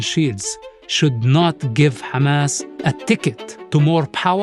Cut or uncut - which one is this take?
cut